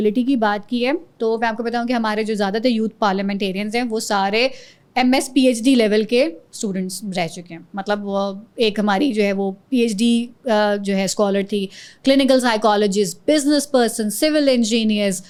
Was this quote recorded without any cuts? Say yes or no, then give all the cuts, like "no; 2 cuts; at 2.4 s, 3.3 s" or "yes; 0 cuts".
yes; 0 cuts